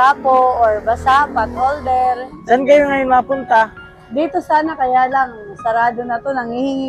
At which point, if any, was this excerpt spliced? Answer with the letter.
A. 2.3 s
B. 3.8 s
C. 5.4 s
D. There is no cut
A